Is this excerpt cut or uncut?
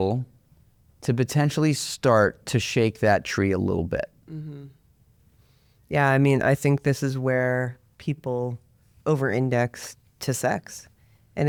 uncut